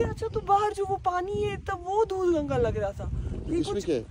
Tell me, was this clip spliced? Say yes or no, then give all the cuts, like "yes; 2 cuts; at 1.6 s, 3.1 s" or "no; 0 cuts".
no; 0 cuts